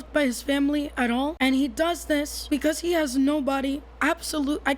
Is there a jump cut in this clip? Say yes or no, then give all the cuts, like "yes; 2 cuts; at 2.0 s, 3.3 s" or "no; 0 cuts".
yes; 2 cuts; at 1.3 s, 2.4 s